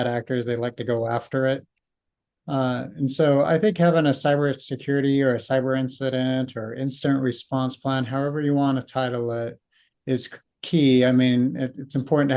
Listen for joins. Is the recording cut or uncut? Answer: uncut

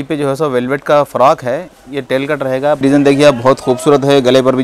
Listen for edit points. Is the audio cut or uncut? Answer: cut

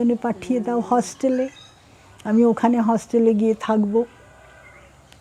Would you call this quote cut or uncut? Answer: uncut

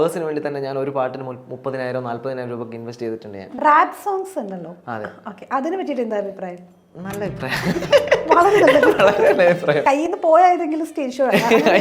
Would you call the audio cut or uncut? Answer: cut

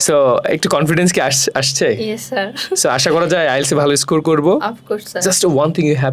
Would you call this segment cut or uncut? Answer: uncut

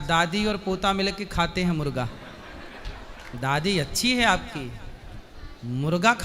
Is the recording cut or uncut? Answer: uncut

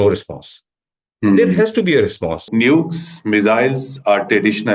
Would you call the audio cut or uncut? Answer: cut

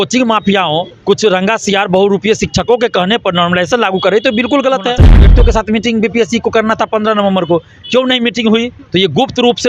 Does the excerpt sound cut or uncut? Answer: cut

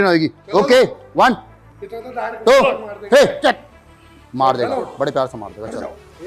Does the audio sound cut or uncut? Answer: uncut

